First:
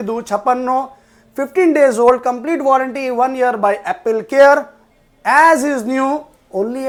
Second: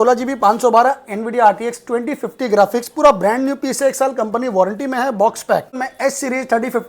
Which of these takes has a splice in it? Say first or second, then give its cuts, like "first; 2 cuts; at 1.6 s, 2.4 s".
second; 1 cut; at 5.9 s